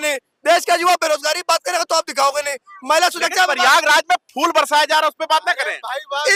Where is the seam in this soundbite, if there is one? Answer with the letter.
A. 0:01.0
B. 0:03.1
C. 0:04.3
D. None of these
D